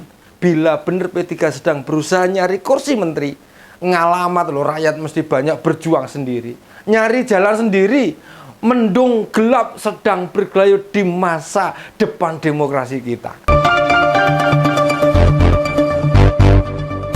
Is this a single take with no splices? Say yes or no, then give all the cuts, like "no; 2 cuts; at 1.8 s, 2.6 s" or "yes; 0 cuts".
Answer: no; 1 cut; at 13.3 s